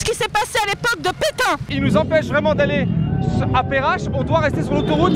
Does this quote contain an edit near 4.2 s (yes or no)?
no